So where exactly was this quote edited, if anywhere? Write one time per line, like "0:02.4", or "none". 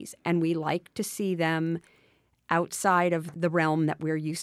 0:03.3